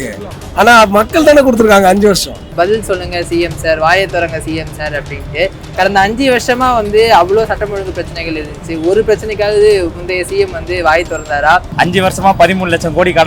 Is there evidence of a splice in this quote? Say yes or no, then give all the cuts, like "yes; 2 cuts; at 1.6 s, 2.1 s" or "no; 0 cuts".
yes; 2 cuts; at 2.4 s, 11.7 s